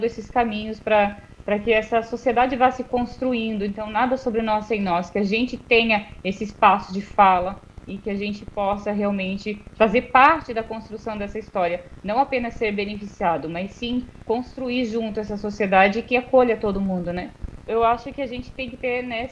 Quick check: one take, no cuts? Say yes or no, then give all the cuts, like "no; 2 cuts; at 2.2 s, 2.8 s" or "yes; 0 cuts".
no; 1 cut; at 17.7 s